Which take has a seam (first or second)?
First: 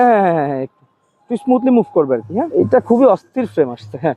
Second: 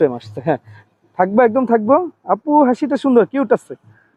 first